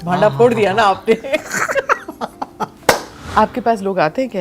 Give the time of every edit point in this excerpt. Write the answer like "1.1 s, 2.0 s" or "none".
3.2 s